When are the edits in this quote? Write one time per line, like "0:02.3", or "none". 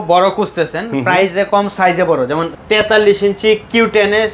0:02.5